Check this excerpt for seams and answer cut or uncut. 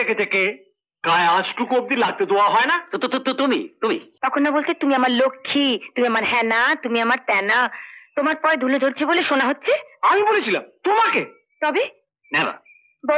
cut